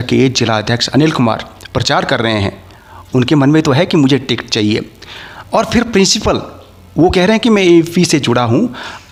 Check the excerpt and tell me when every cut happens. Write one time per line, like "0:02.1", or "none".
none